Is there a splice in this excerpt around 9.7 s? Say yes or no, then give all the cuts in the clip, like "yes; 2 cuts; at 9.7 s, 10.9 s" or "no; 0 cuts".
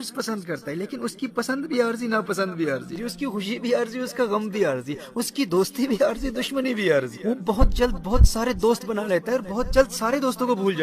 no; 2 cuts; at 3.0 s, 7.1 s